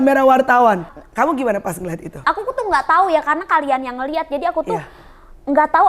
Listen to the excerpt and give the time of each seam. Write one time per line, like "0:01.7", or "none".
0:00.9
0:02.2